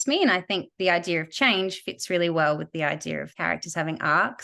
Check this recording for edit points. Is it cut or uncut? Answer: cut